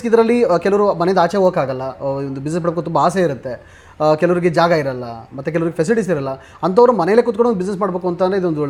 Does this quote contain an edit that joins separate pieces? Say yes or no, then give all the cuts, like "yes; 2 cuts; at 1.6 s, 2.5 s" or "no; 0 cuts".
no; 0 cuts